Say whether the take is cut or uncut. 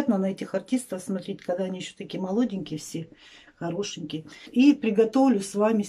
cut